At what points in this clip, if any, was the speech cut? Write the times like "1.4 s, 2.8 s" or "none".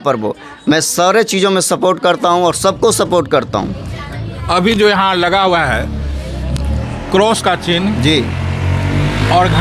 none